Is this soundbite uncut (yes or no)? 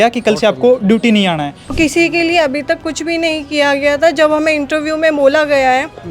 no